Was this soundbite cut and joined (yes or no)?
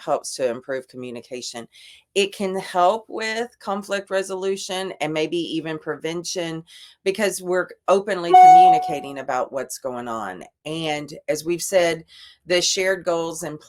no